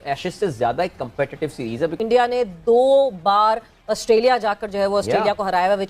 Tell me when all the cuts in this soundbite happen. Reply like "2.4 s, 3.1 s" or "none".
2.0 s